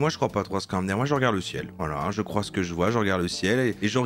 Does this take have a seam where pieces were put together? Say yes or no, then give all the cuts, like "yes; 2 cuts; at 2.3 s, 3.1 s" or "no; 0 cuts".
no; 0 cuts